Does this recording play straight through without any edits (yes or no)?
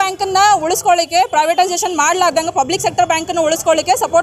yes